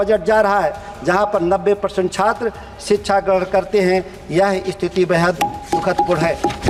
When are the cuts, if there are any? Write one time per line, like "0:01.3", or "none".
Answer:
none